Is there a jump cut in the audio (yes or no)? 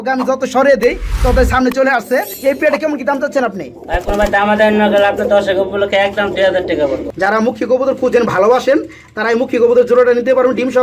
yes